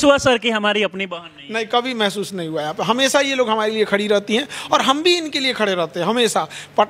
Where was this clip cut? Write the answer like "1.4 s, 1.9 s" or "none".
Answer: none